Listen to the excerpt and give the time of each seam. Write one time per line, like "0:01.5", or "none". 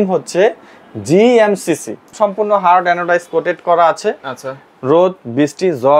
0:02.1